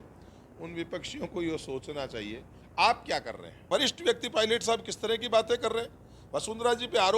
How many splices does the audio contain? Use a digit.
1